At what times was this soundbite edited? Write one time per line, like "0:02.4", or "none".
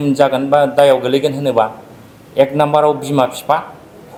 none